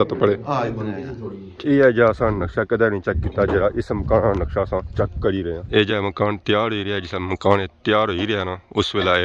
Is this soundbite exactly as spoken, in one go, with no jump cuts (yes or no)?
no